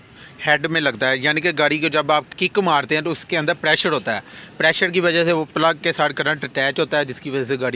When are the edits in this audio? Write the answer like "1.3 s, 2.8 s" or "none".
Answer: 2.3 s